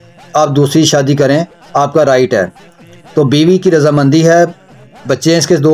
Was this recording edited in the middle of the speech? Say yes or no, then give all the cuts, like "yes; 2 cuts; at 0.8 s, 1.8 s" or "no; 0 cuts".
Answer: no; 0 cuts